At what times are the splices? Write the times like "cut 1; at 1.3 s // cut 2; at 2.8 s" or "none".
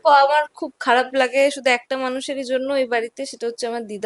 none